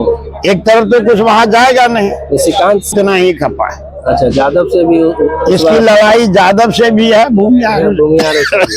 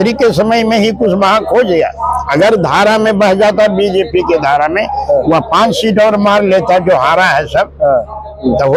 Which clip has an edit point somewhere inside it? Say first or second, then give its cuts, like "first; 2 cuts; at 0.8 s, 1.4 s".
first; 1 cut; at 2.9 s